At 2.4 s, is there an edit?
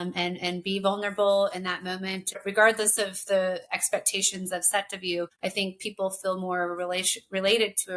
yes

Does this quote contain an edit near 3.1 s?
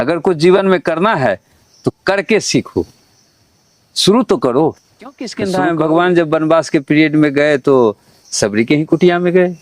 no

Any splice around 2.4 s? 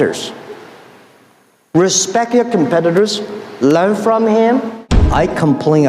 no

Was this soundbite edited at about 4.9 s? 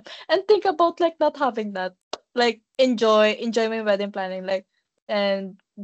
yes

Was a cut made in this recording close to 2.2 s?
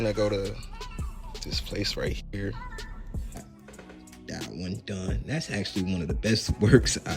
no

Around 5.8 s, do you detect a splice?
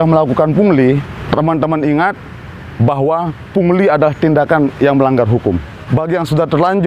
yes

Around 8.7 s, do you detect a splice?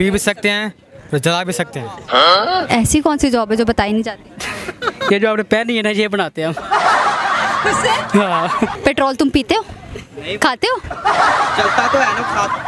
yes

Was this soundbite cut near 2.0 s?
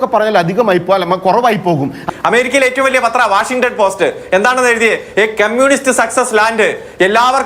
yes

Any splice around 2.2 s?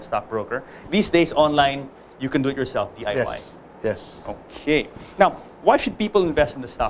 no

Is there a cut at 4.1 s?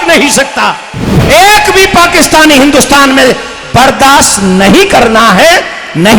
no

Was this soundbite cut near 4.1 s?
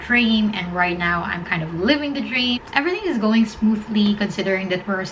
no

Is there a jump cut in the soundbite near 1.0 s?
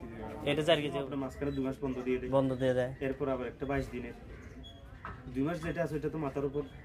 yes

